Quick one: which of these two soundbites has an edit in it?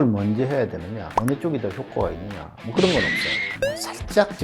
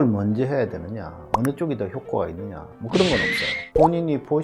first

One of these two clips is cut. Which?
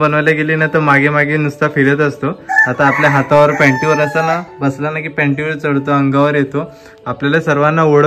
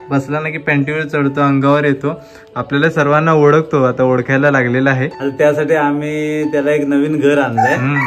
second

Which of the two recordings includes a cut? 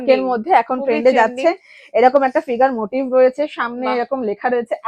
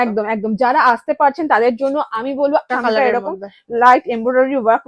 second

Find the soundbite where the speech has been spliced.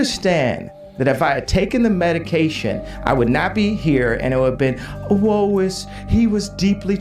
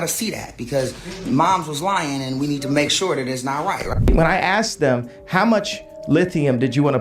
second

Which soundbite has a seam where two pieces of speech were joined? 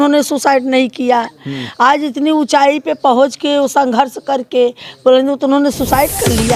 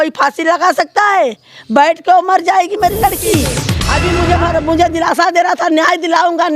second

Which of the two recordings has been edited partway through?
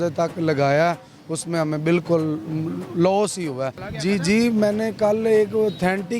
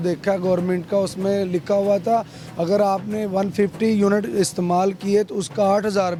first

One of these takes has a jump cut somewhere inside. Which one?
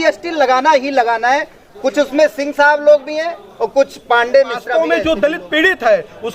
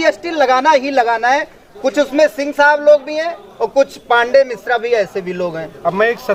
first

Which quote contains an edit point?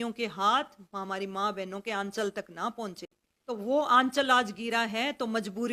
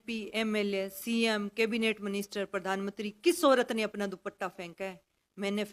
first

